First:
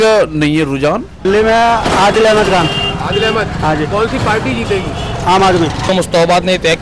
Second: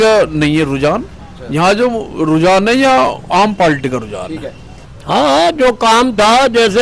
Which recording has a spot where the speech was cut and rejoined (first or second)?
first